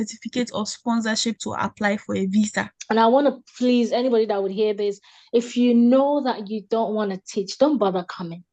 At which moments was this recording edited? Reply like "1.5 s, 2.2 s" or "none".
2.7 s